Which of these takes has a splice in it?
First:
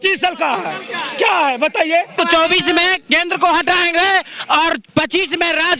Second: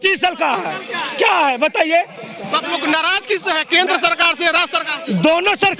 first; 1 cut; at 2.1 s

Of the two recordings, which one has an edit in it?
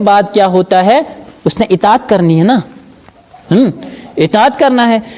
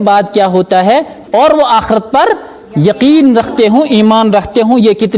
second; 1 cut; at 1.2 s

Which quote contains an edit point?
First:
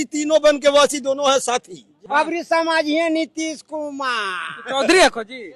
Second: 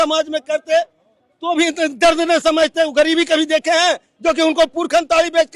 first; 1 cut; at 1.9 s

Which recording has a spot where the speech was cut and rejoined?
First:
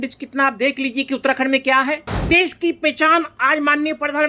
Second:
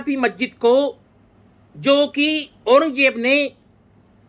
first; 1 cut; at 2.1 s

